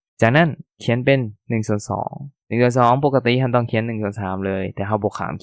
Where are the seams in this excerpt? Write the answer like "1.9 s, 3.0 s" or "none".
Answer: none